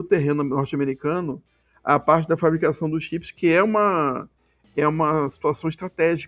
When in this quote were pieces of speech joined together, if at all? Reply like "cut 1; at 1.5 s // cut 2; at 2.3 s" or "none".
none